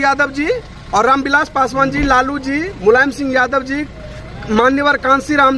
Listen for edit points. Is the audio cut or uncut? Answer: uncut